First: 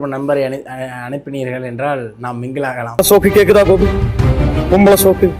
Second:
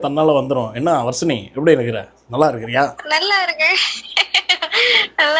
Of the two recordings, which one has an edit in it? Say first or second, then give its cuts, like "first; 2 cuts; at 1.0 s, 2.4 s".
first; 1 cut; at 3.0 s